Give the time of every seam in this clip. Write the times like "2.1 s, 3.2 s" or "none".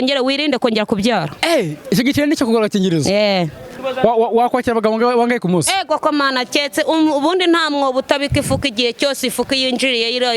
3.8 s